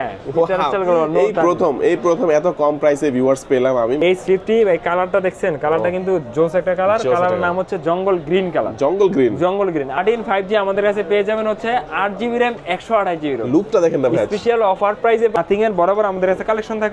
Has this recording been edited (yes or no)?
yes